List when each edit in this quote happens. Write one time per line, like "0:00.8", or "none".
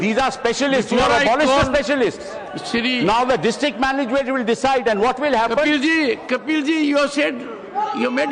none